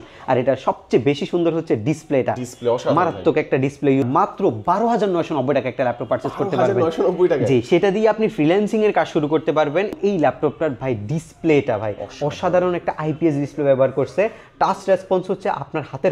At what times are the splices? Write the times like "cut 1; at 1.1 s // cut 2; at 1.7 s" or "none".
cut 1; at 4.1 s // cut 2; at 10.0 s